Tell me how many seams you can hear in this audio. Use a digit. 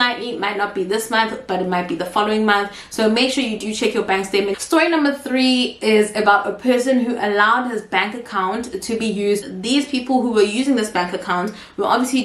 2